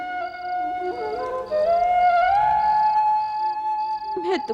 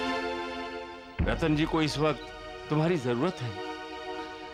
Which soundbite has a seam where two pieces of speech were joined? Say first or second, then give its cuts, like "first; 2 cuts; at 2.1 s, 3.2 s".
first; 1 cut; at 0.9 s